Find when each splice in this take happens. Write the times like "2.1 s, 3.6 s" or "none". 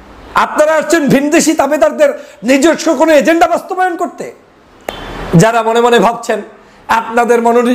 4.6 s